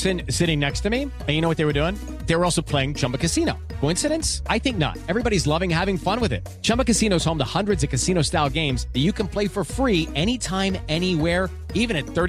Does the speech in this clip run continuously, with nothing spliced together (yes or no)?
yes